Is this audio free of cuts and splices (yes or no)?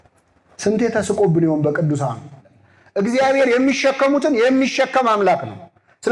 no